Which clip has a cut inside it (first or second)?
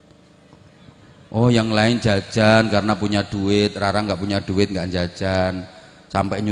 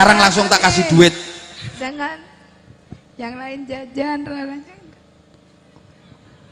second